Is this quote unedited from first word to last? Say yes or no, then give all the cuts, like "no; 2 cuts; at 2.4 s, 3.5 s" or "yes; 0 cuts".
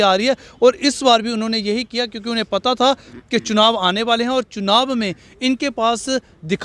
yes; 0 cuts